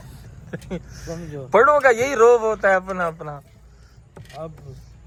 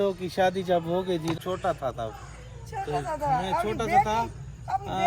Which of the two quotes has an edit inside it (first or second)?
second